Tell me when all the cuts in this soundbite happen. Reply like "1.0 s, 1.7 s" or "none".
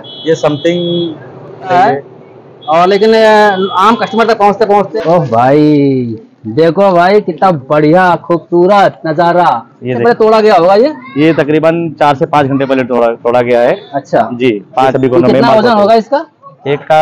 1.7 s, 4.9 s, 10.0 s, 14.9 s